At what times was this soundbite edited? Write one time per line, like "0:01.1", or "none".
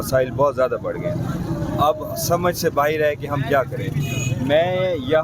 none